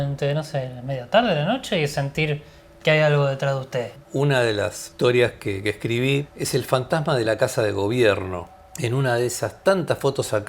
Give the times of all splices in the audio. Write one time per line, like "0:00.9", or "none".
0:04.0
0:04.8
0:08.7